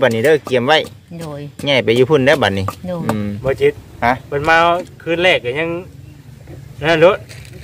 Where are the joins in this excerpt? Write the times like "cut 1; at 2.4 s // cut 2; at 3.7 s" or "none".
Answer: cut 1; at 3.4 s

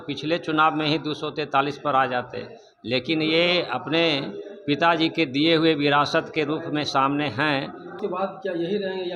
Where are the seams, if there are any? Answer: cut 1; at 8.0 s

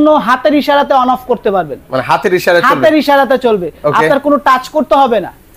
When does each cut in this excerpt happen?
none

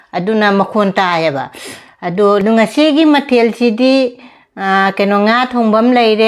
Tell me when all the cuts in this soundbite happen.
cut 1; at 2.4 s

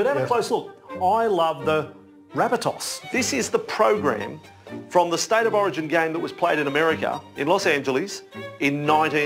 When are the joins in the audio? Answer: cut 1; at 2.9 s

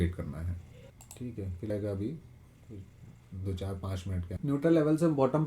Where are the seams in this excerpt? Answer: cut 1; at 1.7 s // cut 2; at 4.4 s

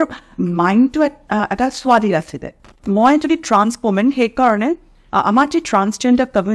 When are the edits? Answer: cut 1; at 2.8 s

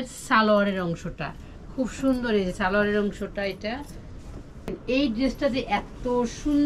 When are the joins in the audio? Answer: cut 1; at 4.7 s

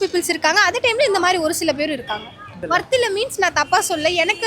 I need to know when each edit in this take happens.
cut 1; at 2.6 s

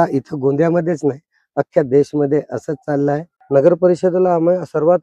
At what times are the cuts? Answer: cut 1; at 3.3 s

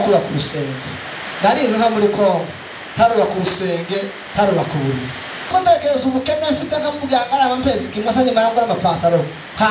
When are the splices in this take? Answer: cut 1; at 5.5 s

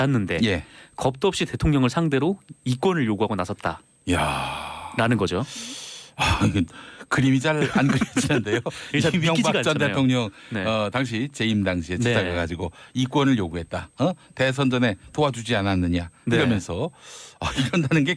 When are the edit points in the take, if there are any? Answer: cut 1; at 12.5 s

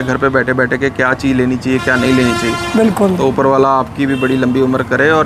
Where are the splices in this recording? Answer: none

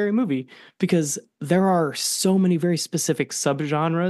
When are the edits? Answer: none

